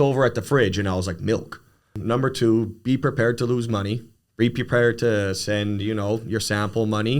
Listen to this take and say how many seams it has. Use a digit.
1